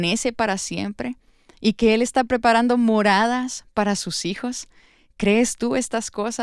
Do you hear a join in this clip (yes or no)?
no